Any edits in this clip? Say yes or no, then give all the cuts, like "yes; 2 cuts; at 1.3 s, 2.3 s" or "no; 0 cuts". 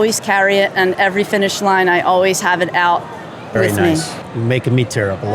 yes; 1 cut; at 4.2 s